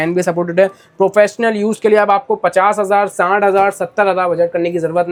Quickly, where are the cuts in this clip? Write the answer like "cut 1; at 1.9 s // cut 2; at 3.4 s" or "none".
none